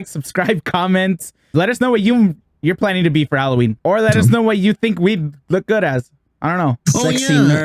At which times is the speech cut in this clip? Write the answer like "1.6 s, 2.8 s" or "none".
1.5 s, 3.8 s